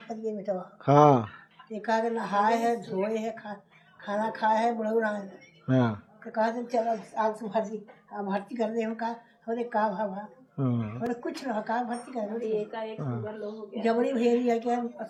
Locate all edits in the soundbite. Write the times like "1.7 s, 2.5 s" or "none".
none